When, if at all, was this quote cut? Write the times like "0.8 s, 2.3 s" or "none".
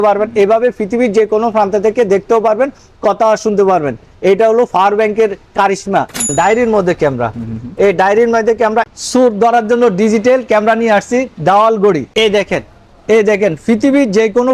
6.3 s, 8.9 s, 12.1 s

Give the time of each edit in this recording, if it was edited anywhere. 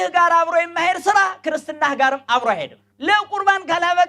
2.9 s

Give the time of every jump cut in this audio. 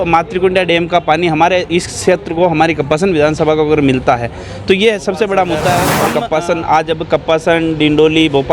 5.9 s

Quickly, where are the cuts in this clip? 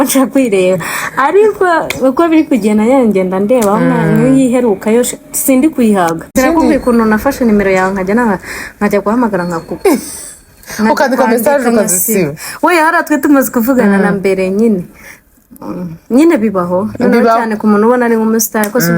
6.3 s

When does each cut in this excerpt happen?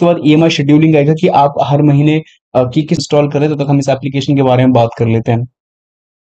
3.0 s

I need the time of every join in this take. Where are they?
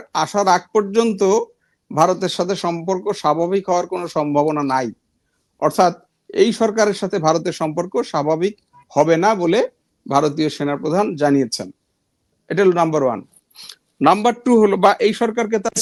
none

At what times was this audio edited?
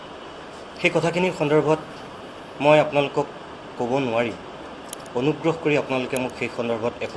none

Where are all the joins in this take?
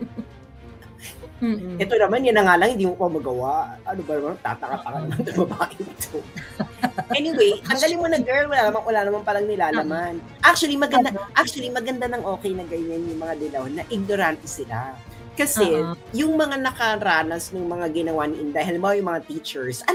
none

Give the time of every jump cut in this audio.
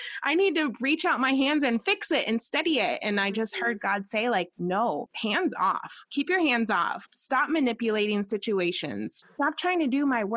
4.9 s, 7.0 s, 9.1 s

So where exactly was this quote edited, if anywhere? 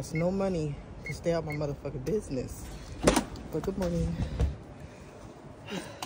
none

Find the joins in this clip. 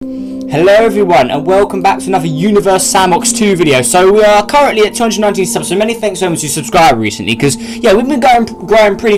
none

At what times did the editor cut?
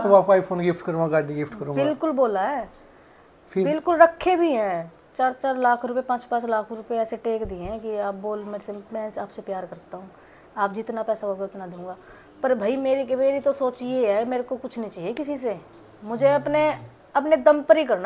none

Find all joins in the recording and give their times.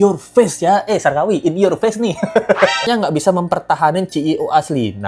2.8 s

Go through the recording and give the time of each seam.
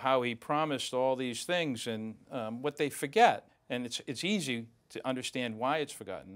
3.5 s

